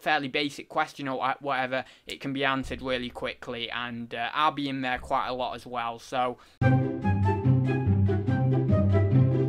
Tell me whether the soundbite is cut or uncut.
cut